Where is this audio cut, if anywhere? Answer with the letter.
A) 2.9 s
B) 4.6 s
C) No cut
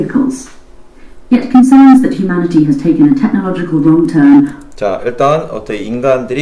C